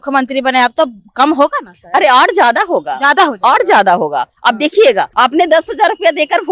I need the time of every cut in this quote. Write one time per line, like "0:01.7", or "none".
0:05.1